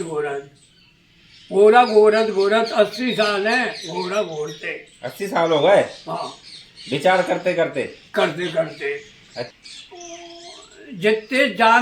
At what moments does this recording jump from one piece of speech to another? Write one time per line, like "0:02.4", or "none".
0:09.5